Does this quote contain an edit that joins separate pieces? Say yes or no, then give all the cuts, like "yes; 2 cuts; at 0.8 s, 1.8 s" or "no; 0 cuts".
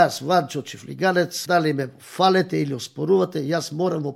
yes; 1 cut; at 1.4 s